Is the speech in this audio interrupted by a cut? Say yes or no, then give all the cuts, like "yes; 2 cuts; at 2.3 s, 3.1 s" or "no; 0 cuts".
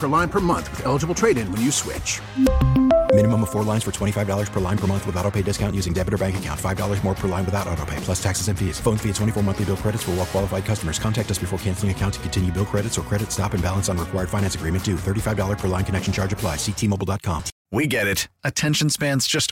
yes; 1 cut; at 17.5 s